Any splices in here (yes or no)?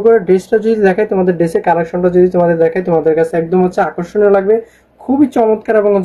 no